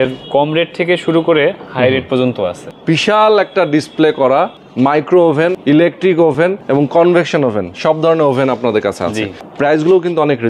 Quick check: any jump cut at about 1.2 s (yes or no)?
no